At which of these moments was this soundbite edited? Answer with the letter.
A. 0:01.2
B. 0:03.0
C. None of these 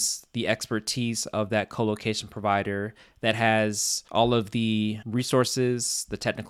C